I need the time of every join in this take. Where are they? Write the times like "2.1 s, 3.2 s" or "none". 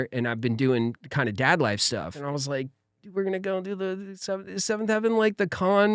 2.2 s